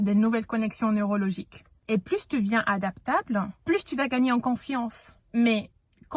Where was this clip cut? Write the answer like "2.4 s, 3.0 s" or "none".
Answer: none